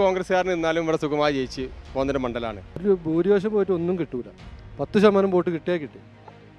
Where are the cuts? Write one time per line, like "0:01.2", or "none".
0:02.7